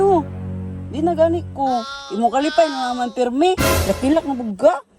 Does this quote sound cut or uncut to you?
cut